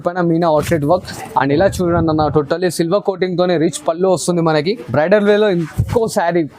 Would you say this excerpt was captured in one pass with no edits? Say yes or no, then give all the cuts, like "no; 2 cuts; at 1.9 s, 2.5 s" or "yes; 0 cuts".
no; 1 cut; at 4.8 s